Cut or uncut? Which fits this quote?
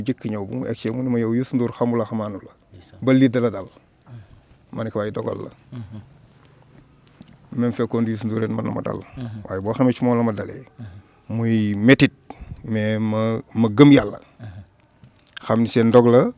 uncut